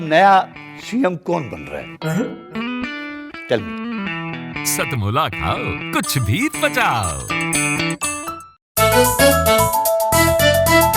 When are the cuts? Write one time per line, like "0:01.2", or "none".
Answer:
0:08.6